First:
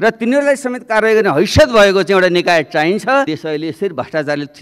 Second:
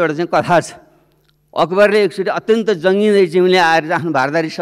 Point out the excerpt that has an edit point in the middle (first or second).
first